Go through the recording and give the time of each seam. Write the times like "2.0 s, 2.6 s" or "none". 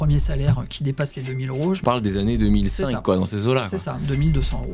1.8 s